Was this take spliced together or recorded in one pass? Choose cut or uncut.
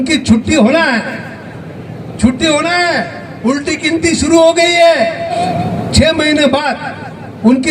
cut